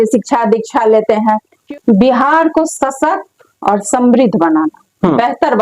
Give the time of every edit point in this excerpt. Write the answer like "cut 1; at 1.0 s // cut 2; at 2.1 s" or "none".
cut 1; at 1.5 s